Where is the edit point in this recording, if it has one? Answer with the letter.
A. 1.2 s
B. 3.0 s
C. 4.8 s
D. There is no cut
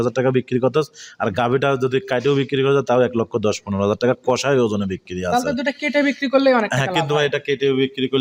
D